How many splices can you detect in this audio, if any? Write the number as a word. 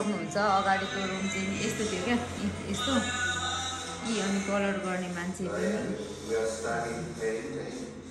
zero